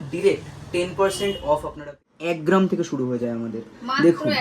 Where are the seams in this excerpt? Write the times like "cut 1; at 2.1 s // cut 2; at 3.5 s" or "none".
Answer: cut 1; at 2.0 s